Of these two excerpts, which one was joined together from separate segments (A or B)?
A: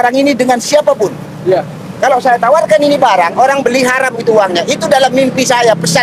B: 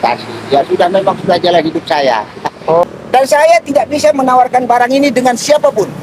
B